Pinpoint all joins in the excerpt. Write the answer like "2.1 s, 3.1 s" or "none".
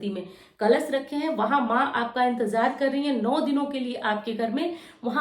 none